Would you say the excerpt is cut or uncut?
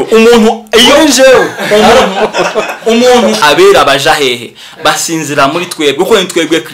cut